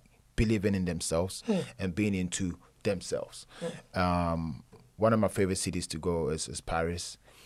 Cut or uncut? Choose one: uncut